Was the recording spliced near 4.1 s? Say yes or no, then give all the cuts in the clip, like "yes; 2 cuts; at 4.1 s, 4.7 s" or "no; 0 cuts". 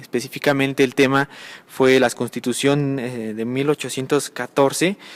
yes; 1 cut; at 4.1 s